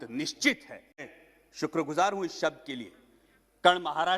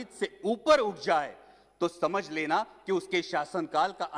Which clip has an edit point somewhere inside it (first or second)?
first